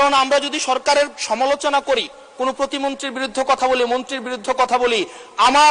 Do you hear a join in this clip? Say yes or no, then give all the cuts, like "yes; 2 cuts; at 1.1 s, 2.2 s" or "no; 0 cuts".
no; 0 cuts